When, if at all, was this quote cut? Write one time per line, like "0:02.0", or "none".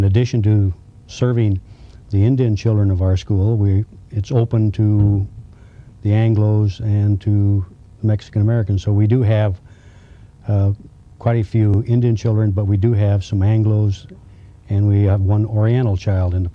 0:14.9